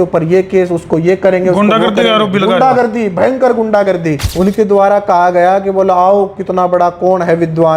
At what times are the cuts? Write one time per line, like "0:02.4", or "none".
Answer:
0:04.2